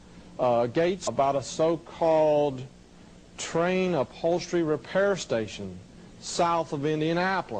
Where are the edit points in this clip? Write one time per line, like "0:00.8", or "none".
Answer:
none